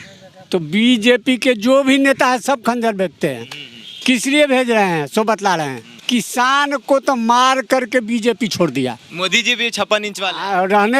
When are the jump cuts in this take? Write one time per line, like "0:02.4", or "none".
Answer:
0:06.0
0:09.1